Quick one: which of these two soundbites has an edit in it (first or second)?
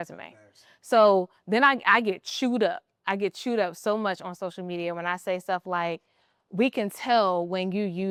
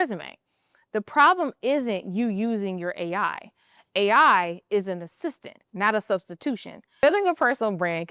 second